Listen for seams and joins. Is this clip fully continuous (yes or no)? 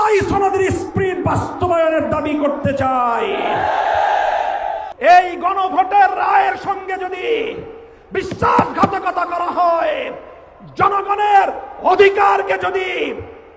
no